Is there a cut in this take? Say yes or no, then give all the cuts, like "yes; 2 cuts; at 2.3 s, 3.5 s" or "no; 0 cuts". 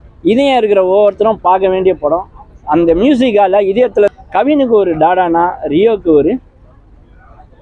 yes; 1 cut; at 4.1 s